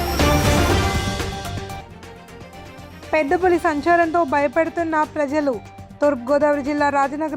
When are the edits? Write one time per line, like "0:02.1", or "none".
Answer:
none